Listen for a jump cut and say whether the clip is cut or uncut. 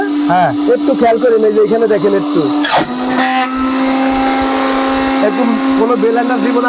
uncut